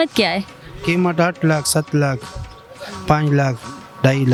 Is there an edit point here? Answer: no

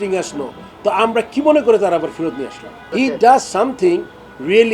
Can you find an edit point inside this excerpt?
yes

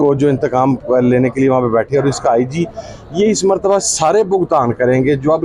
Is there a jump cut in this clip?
no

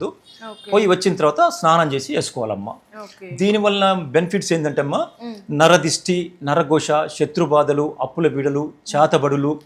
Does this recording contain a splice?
no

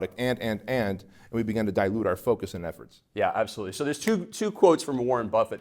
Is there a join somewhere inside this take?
no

